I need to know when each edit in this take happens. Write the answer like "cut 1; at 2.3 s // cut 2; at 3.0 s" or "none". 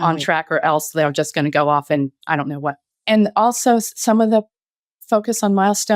cut 1; at 3.0 s